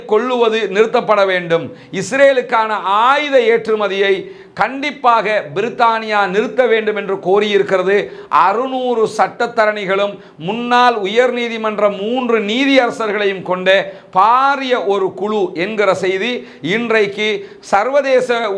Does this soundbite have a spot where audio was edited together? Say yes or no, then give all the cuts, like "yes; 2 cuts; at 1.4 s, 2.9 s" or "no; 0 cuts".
no; 0 cuts